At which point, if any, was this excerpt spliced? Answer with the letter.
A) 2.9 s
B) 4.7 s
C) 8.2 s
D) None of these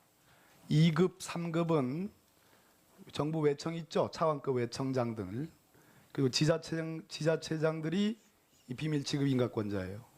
D